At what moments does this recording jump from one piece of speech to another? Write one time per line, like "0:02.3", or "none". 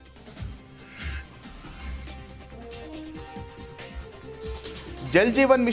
none